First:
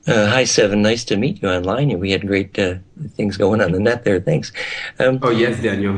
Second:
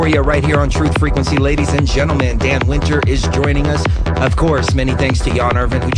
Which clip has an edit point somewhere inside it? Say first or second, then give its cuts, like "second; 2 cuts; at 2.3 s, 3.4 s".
first; 1 cut; at 1.8 s